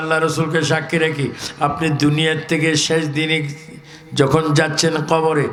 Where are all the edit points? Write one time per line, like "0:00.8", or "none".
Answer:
none